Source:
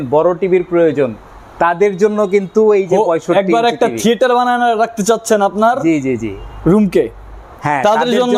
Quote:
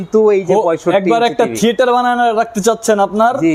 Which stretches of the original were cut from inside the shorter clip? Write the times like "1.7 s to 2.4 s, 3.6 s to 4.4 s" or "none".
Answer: none